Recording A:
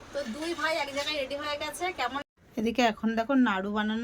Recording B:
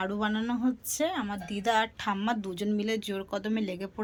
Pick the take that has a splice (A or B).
A